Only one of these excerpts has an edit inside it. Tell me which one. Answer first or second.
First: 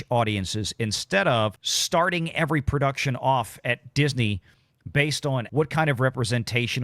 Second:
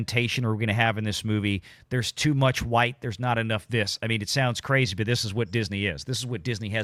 first